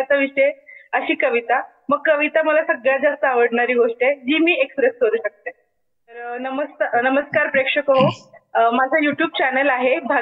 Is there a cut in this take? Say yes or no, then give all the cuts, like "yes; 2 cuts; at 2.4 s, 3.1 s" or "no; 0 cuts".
yes; 1 cut; at 6.3 s